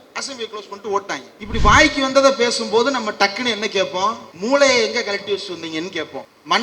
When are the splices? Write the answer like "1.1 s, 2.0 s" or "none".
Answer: 1.3 s

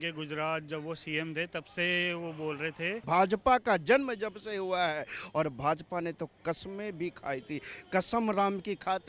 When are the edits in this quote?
3.0 s

